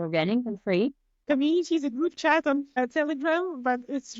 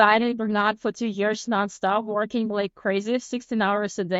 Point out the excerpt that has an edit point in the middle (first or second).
first